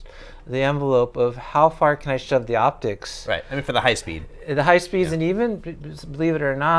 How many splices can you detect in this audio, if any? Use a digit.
0